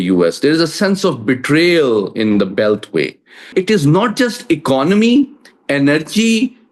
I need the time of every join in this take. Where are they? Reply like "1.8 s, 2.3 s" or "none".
3.5 s